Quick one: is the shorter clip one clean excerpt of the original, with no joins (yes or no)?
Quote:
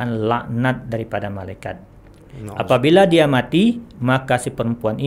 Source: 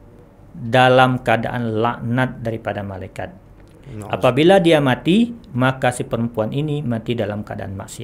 yes